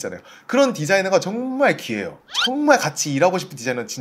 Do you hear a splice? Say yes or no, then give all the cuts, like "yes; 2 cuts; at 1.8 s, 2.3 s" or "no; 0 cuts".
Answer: yes; 1 cut; at 2.2 s